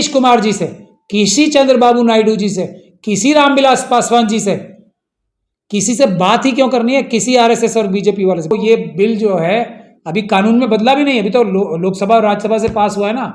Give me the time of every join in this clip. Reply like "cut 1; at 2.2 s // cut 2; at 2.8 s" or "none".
cut 1; at 8.5 s